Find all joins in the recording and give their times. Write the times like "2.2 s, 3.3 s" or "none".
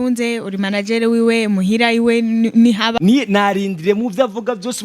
3.0 s